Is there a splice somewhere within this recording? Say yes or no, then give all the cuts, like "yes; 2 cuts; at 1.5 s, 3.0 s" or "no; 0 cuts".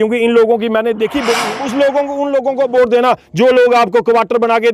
yes; 1 cut; at 1.6 s